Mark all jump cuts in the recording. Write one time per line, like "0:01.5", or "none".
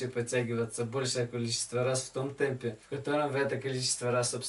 0:02.9